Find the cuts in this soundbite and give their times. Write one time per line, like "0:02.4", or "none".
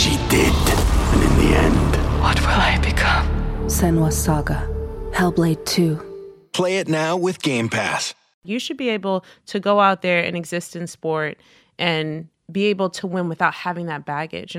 0:08.5
0:12.3